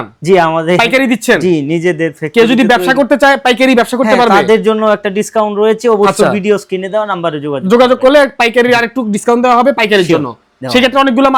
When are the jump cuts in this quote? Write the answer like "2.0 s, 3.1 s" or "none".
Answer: none